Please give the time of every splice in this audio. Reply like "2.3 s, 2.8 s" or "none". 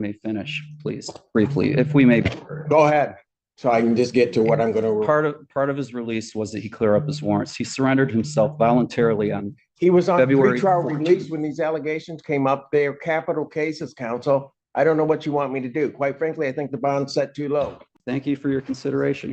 17.9 s